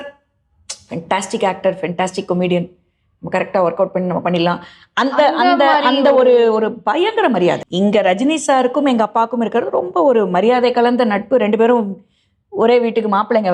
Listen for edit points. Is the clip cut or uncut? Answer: cut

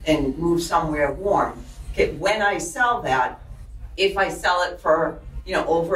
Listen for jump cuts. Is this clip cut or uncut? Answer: uncut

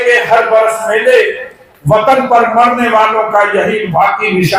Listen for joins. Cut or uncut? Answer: uncut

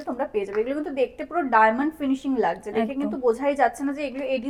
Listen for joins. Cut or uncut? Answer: uncut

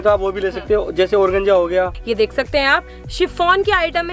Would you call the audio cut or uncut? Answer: cut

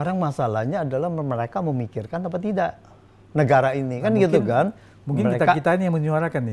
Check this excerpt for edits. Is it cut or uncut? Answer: uncut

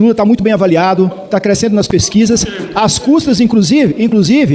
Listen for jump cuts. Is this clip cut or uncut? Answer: uncut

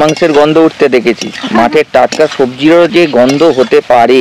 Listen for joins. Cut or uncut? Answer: uncut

